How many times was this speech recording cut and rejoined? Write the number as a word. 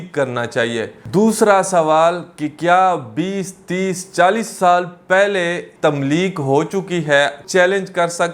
three